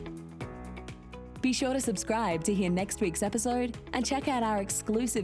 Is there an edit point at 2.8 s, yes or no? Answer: no